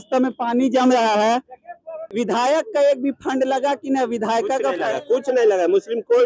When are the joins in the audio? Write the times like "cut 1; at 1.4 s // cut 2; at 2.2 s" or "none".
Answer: cut 1; at 2.0 s